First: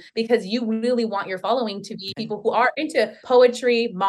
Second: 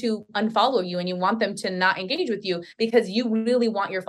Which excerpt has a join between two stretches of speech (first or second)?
first